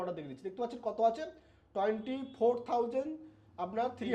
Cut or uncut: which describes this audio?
uncut